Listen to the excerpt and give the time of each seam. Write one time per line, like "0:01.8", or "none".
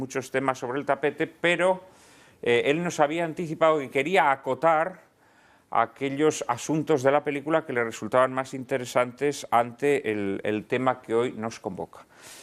0:04.8